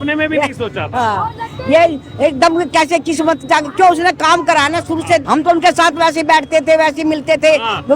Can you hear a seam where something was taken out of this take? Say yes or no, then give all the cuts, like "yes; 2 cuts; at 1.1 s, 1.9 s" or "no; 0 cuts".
yes; 1 cut; at 5.2 s